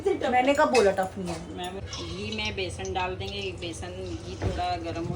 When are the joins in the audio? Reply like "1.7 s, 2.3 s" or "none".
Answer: 1.8 s

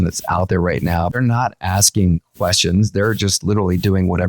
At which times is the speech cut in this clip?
1.1 s

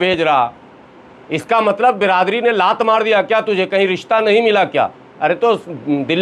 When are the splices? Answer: none

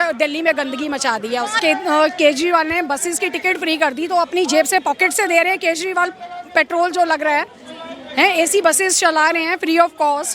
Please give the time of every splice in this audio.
1.6 s

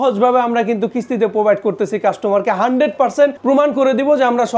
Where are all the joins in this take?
3.4 s

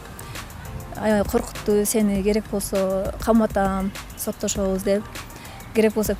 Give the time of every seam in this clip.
none

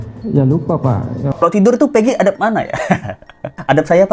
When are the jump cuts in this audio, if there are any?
1.4 s

